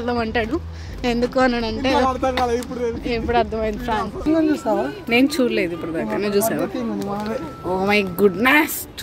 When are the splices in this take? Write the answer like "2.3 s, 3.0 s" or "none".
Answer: 4.3 s